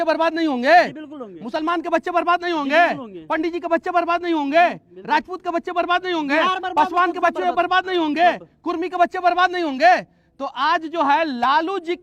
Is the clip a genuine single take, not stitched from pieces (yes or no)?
yes